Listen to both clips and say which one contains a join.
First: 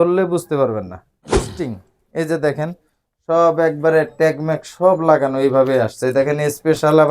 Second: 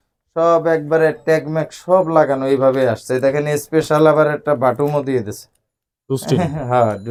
first; 1 cut; at 1.5 s

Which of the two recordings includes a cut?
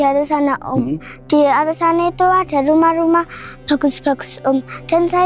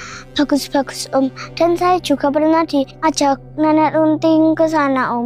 second; 1 cut; at 2.9 s

